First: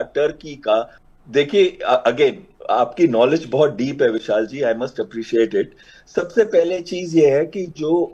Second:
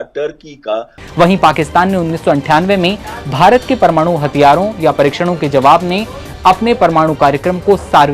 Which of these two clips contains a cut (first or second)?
second